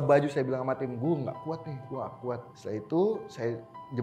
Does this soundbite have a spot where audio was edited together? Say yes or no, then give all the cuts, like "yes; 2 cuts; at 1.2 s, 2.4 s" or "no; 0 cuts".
yes; 1 cut; at 2.5 s